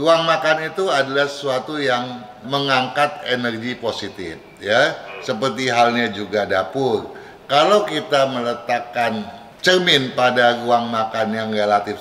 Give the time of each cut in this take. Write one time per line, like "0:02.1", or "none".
none

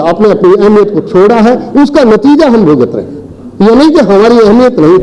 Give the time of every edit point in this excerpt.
none

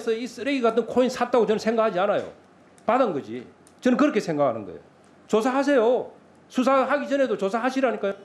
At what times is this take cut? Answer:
none

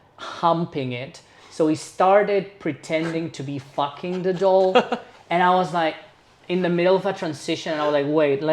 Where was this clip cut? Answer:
none

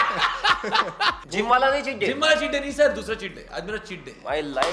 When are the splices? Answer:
0:01.2

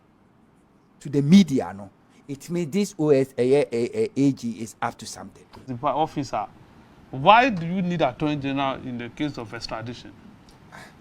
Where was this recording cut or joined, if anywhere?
0:05.6

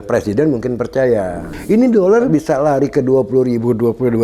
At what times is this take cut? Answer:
0:01.5
0:02.3

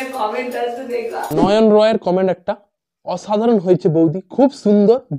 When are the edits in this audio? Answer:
none

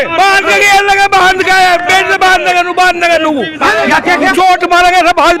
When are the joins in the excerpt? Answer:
0:03.9

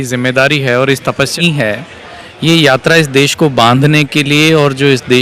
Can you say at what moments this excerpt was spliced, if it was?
0:01.4

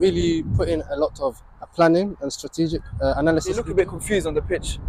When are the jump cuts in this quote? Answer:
0:03.7

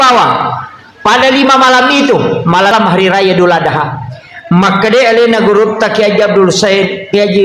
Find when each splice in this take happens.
0:02.7

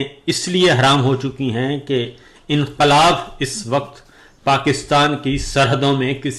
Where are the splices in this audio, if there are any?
none

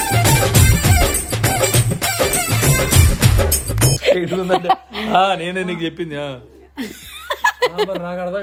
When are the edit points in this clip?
none

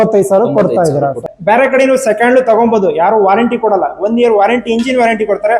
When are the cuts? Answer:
0:01.3

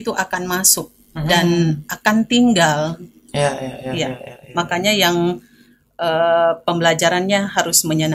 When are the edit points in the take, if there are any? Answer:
none

